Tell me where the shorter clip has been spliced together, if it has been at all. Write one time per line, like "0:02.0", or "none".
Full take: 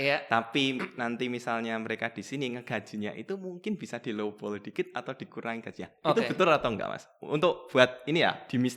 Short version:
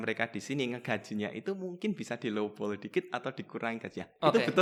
none